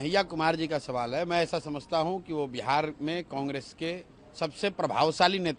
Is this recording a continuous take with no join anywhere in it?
yes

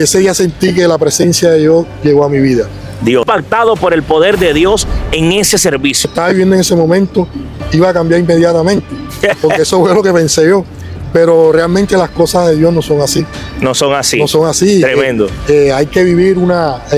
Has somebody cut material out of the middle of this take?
yes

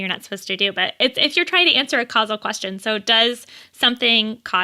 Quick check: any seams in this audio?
no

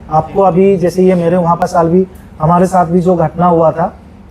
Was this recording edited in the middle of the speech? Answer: yes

